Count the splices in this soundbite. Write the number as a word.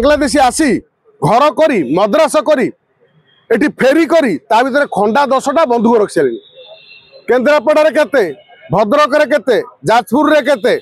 zero